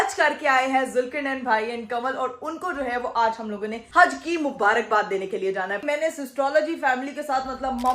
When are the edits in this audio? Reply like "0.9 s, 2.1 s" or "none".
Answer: 5.8 s